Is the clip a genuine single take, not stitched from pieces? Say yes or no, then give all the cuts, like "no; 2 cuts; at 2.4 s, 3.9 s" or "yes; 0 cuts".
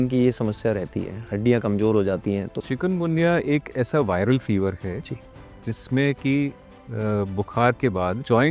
no; 1 cut; at 2.6 s